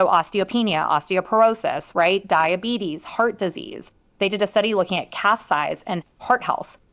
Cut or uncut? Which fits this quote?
uncut